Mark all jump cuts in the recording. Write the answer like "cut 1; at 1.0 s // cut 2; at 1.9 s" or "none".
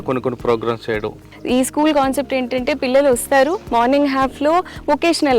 cut 1; at 1.2 s